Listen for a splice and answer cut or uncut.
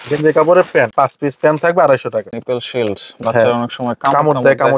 cut